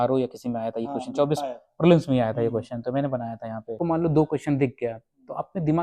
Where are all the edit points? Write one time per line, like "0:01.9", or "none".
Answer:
0:03.8